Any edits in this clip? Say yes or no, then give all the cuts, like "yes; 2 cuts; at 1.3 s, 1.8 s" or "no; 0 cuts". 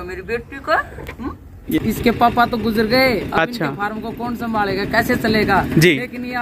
yes; 1 cut; at 1.6 s